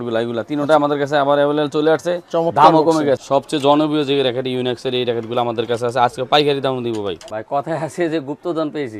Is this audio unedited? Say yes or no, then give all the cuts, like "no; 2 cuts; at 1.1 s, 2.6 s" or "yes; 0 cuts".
no; 2 cuts; at 3.2 s, 7.2 s